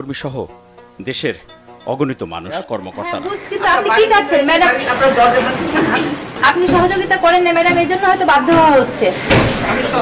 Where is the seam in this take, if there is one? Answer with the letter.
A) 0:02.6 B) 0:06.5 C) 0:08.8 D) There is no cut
A